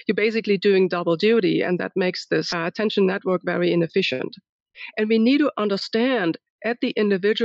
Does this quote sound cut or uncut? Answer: cut